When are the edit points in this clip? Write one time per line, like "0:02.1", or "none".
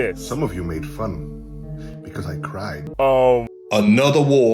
0:02.8
0:03.6